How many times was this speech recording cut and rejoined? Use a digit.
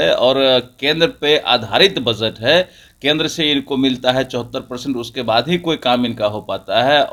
0